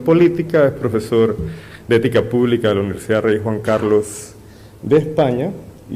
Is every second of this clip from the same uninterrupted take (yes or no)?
no